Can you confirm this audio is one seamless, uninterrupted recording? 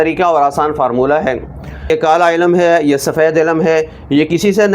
no; 1 cut; at 1.9 s

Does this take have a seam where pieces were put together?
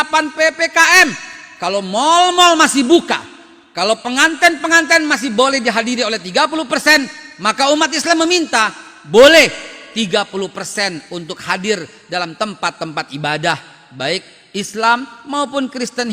no; 0 cuts

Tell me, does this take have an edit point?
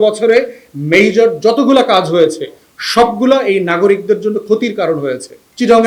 no; 0 cuts

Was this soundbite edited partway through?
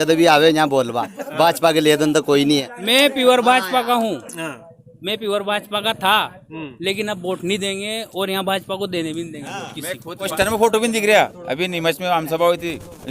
yes; 2 cuts; at 2.7 s, 10.3 s

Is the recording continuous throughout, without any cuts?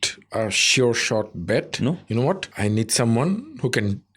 no; 1 cut; at 2.5 s

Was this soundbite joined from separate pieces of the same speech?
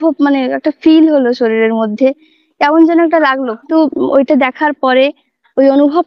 yes; 1 cut; at 3.7 s

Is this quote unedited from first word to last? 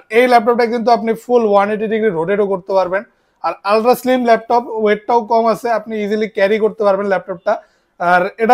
yes; 0 cuts

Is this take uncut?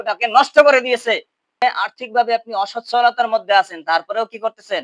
no; 1 cut; at 1.6 s

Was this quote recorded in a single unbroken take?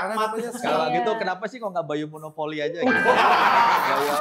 yes; 0 cuts

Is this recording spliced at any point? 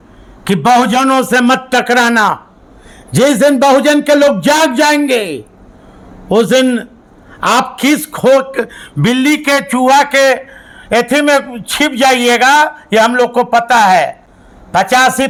no; 0 cuts

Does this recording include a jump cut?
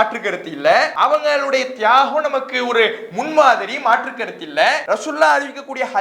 yes; 2 cuts; at 0.9 s, 4.8 s

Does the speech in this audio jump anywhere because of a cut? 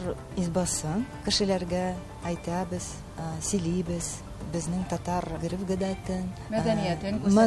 yes; 3 cuts; at 1.1 s, 5.4 s, 6.4 s

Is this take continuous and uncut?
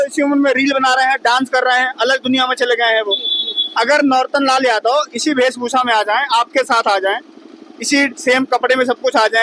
yes; 0 cuts

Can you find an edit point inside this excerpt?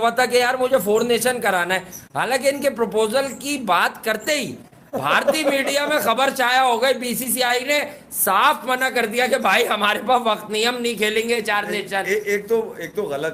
no; 0 cuts

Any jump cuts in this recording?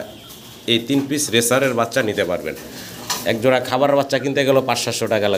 no; 0 cuts

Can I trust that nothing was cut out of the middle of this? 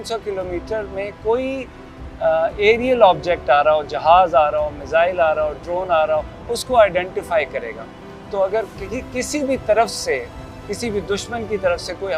yes; 0 cuts

